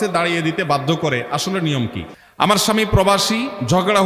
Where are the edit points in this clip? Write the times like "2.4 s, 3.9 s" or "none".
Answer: 2.0 s

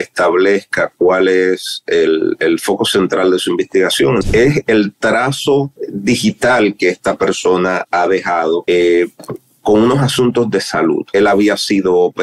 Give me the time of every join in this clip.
4.2 s, 5.8 s, 8.6 s, 11.0 s

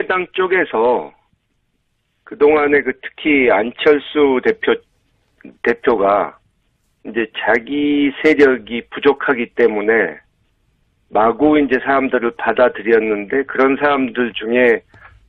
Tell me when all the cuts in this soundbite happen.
5.8 s

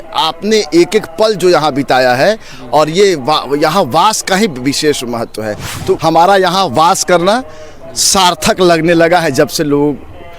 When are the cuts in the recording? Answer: 6.0 s

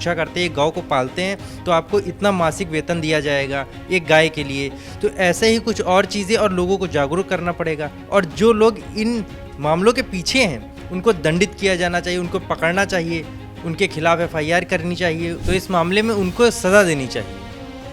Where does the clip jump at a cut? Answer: none

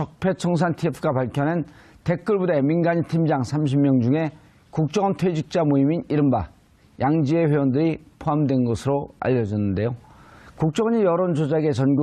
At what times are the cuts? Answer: none

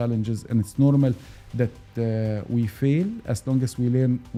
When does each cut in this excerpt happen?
none

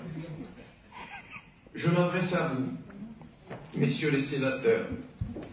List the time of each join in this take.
1.8 s

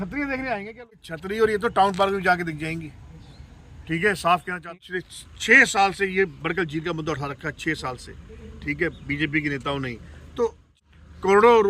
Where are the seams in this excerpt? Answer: 0.9 s, 4.7 s, 10.8 s

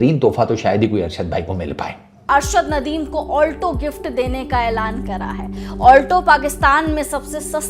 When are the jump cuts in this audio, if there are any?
2.3 s

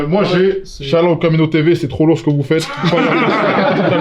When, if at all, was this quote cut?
none

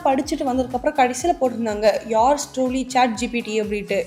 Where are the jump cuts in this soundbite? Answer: none

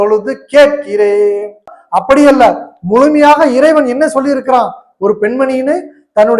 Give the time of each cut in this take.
1.8 s

